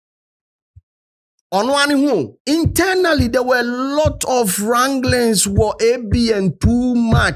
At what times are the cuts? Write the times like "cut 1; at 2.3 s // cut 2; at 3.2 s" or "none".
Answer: cut 1; at 2.3 s